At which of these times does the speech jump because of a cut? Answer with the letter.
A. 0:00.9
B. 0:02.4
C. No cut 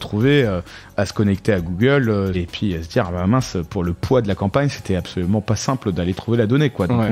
B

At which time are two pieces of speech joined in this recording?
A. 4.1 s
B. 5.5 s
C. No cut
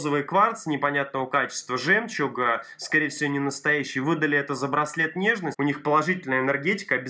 B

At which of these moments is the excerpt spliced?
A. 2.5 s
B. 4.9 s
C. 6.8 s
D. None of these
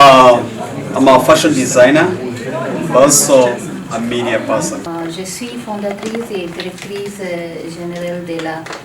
B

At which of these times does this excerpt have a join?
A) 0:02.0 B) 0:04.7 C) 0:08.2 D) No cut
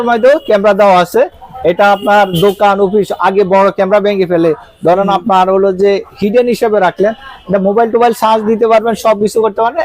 D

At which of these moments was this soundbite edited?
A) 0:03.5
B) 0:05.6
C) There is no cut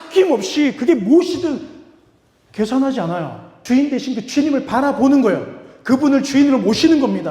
A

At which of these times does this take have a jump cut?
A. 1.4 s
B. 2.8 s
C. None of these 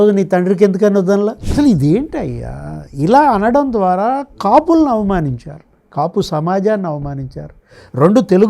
A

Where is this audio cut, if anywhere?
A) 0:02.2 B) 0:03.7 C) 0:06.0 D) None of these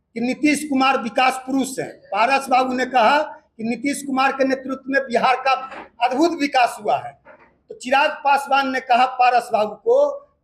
D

